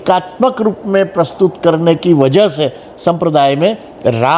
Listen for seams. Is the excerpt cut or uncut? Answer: uncut